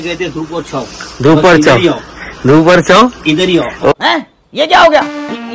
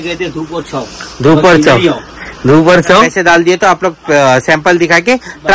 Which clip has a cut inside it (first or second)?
second